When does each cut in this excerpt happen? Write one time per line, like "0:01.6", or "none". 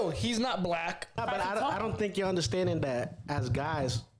0:01.2